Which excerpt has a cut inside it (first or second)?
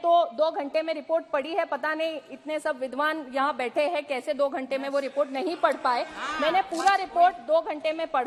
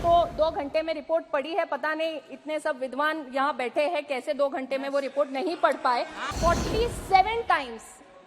second